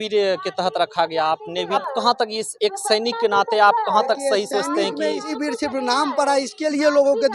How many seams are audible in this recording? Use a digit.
2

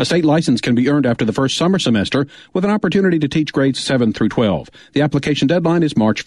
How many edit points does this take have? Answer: 0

